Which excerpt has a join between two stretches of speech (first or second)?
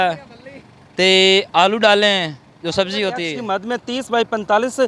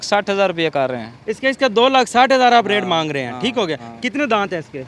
first